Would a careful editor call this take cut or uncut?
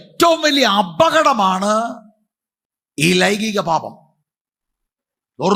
uncut